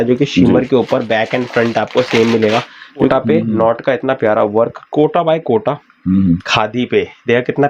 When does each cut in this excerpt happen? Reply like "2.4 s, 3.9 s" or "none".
3.1 s, 6.5 s